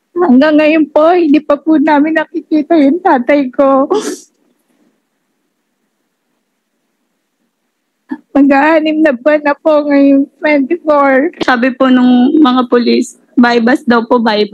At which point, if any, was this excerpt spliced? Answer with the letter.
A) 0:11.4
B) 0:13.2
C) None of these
A